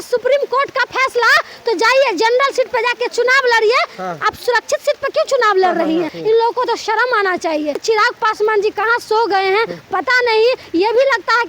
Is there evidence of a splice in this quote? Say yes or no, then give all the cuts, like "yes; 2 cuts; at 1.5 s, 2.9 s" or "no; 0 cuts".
yes; 2 cuts; at 6.1 s, 7.8 s